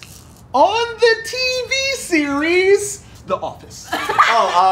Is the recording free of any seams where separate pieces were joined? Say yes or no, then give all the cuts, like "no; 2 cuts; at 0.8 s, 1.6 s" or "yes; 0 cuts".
no; 1 cut; at 3.1 s